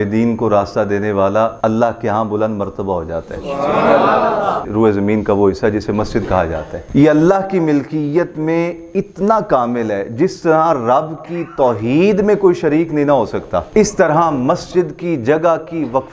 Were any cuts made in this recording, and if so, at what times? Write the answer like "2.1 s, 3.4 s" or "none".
1.5 s, 4.7 s, 6.7 s, 13.7 s

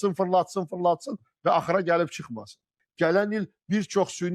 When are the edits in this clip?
2.7 s

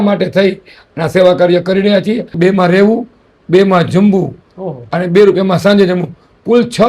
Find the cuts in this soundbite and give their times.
2.3 s

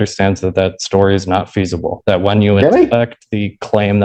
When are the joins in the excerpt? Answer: none

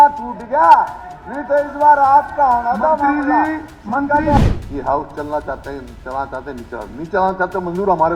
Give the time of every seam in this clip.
4.4 s

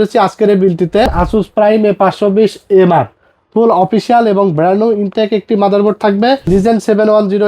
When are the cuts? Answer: 1.1 s, 6.5 s

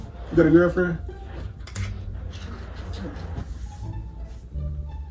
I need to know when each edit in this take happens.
3.2 s

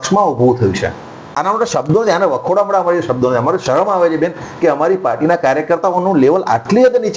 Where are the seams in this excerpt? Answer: 1.4 s

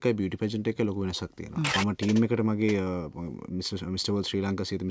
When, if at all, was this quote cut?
1.7 s

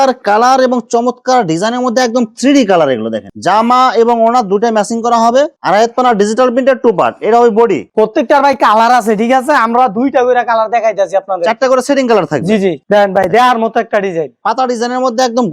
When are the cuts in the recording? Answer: 3.3 s, 5.5 s, 12.8 s

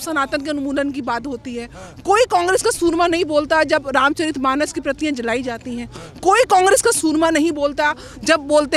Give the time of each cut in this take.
none

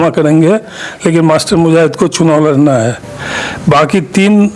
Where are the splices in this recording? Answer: none

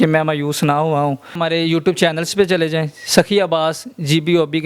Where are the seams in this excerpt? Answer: 1.4 s

